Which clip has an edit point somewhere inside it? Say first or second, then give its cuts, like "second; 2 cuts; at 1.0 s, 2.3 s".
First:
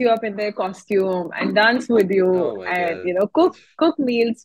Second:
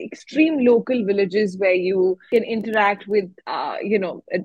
second; 2 cuts; at 2.2 s, 3.4 s